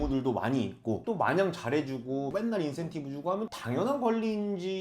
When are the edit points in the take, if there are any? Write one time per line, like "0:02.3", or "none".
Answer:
0:02.3
0:03.5

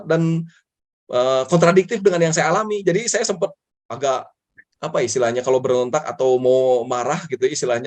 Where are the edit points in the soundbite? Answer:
none

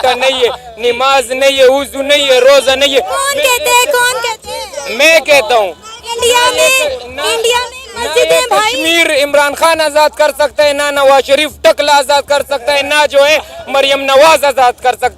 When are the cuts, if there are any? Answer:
none

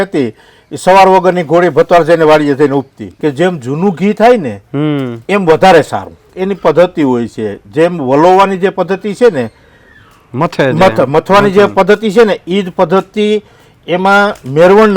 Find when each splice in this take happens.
0:03.0
0:06.3

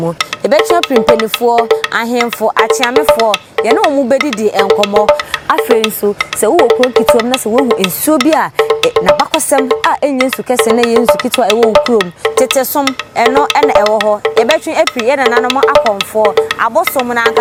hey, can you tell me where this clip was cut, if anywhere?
none

